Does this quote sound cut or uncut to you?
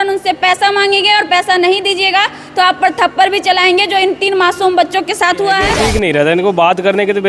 cut